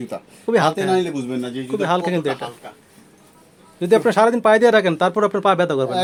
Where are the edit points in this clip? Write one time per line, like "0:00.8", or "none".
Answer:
none